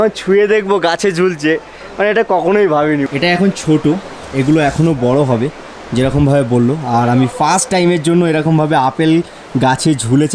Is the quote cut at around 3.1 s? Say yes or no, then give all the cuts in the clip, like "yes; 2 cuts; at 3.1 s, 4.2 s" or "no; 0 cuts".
yes; 1 cut; at 3.1 s